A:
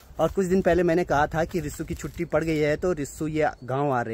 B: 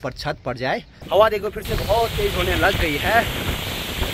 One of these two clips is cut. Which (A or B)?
B